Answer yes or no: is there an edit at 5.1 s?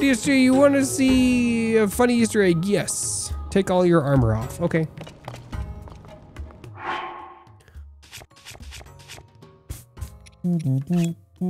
no